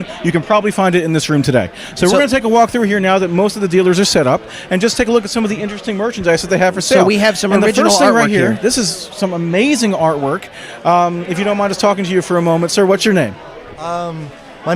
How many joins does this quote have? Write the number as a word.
one